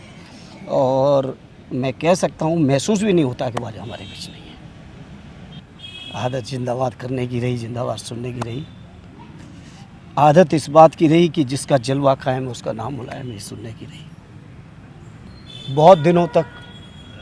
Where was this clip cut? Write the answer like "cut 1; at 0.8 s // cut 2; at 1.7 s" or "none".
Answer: cut 1; at 5.6 s // cut 2; at 15.3 s